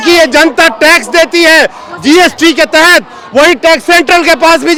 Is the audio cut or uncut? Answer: uncut